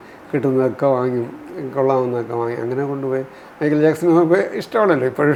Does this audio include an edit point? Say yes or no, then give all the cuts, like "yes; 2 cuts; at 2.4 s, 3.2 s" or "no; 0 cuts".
no; 0 cuts